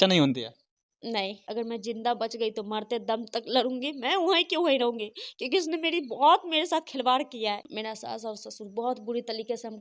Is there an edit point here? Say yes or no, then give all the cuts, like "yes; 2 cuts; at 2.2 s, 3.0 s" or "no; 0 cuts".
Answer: yes; 2 cuts; at 1.0 s, 7.7 s